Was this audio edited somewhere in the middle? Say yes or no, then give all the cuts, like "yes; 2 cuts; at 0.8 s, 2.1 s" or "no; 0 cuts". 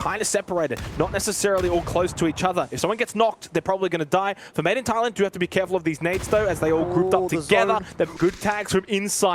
yes; 1 cut; at 8.1 s